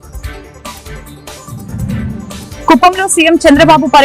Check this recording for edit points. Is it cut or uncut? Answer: cut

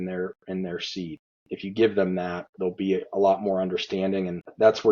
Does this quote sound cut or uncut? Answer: cut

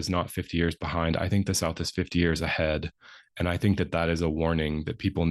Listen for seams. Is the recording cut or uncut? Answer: uncut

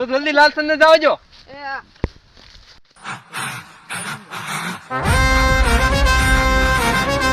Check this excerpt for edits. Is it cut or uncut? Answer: uncut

